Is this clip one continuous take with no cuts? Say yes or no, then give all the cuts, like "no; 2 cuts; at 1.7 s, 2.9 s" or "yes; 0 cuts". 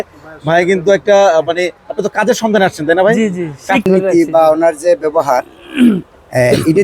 no; 1 cut; at 3.9 s